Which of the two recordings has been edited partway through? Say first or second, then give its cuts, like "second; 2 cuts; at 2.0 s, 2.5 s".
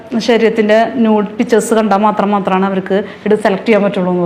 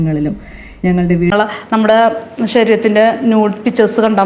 second; 1 cut; at 1.3 s